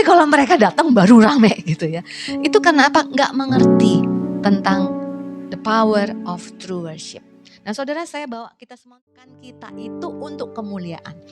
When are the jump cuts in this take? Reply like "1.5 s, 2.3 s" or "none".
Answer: 8.7 s